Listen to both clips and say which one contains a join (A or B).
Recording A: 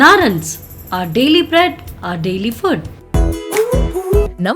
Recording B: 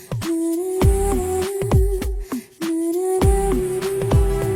A